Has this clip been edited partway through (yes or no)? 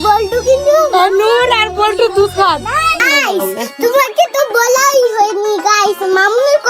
yes